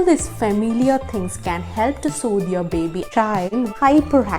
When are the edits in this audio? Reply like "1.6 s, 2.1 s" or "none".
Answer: 3.1 s